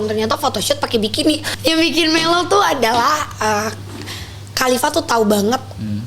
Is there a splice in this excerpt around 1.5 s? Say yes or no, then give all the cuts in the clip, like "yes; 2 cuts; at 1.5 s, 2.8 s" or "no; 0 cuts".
yes; 1 cut; at 1.5 s